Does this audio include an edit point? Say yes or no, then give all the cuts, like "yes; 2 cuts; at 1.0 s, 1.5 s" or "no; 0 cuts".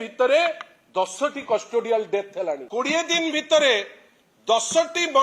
yes; 1 cut; at 2.6 s